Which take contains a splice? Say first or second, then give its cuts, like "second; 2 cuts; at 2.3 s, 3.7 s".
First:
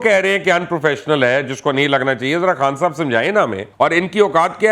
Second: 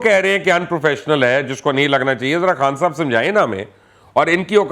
first; 1 cut; at 3.6 s